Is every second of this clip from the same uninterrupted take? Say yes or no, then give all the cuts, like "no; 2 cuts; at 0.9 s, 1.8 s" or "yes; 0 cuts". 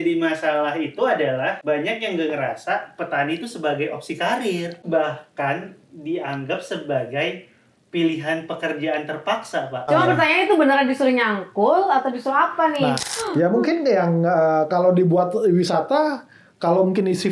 no; 4 cuts; at 1.6 s, 4.8 s, 9.9 s, 13.0 s